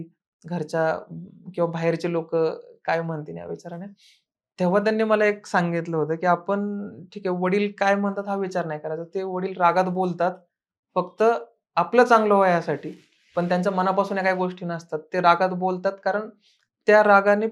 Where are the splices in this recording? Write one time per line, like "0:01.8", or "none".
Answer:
none